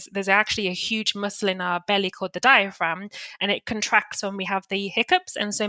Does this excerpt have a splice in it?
no; 0 cuts

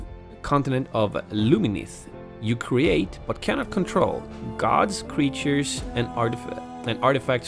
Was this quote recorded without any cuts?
no; 1 cut; at 6.2 s

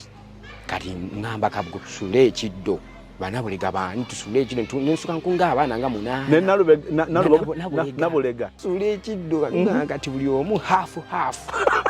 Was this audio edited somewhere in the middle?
yes; 1 cut; at 8.6 s

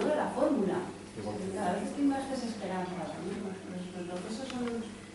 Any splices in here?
no; 0 cuts

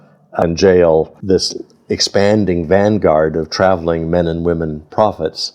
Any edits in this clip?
no; 0 cuts

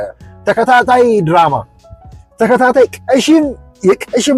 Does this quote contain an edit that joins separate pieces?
no; 0 cuts

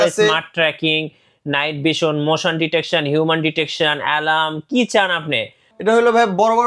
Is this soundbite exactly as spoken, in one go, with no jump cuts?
no; 1 cut; at 5.7 s

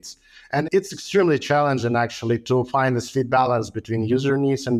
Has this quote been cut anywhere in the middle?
no; 0 cuts

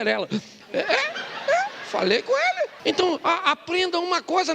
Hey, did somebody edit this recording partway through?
yes; 1 cut; at 2.8 s

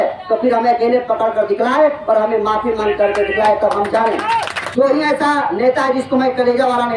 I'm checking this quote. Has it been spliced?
yes; 1 cut; at 4.6 s

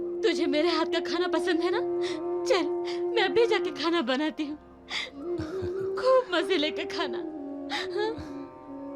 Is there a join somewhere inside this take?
no; 0 cuts

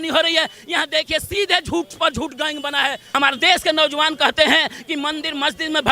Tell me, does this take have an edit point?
yes; 1 cut; at 3.0 s

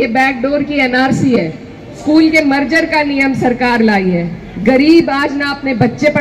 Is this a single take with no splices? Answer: no; 1 cut; at 2.0 s

